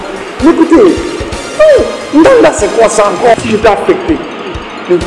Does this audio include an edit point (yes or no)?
yes